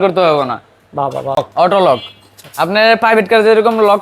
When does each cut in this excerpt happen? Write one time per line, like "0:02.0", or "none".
0:01.4